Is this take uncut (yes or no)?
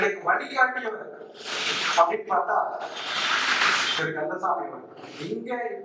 yes